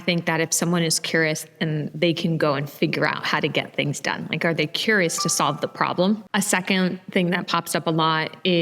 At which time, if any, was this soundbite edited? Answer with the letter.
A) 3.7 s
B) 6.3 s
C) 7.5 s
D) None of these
B